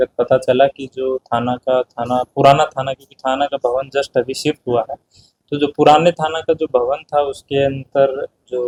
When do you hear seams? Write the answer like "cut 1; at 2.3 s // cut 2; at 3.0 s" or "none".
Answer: none